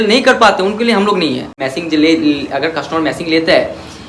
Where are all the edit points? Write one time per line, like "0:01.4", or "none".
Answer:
0:01.5